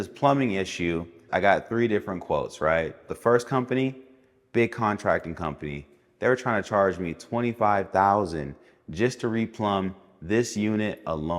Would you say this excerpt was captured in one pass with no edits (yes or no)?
no